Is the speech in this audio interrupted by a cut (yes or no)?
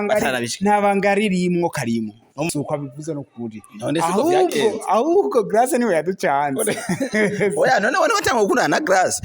yes